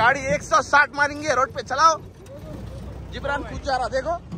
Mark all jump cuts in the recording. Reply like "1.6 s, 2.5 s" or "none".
none